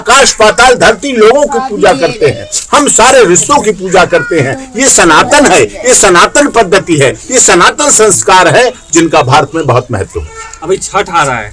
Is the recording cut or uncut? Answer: uncut